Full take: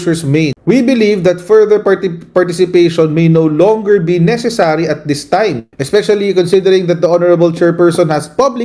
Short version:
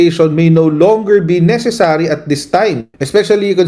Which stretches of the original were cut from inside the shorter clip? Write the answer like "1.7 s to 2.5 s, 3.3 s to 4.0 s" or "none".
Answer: none